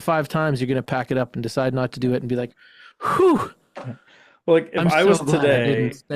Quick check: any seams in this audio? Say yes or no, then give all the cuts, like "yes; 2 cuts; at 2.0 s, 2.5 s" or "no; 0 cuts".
no; 0 cuts